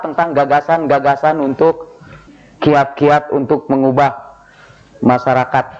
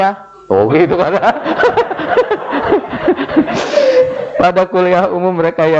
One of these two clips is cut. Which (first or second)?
first